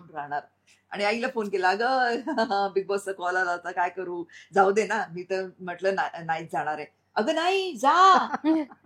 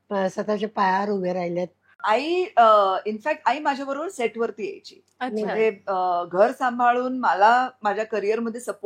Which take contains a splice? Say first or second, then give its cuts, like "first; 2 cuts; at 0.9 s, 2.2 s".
second; 1 cut; at 1.9 s